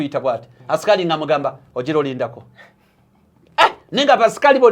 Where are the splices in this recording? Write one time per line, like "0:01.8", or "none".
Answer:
none